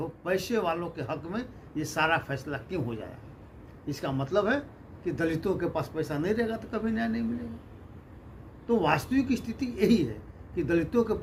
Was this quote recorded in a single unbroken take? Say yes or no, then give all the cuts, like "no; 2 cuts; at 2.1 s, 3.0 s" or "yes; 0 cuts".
yes; 0 cuts